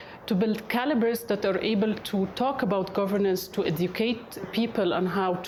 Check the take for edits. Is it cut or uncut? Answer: uncut